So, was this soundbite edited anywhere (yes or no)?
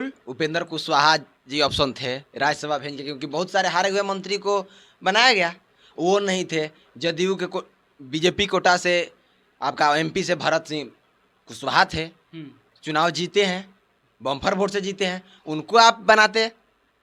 no